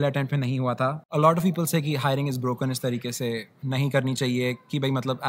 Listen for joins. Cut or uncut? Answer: cut